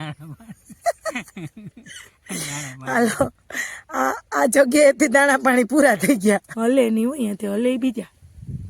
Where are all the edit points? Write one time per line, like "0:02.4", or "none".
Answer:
0:06.5